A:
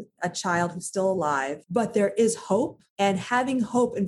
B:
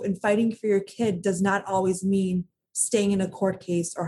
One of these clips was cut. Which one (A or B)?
A